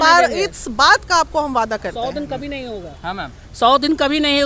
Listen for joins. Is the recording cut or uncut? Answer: uncut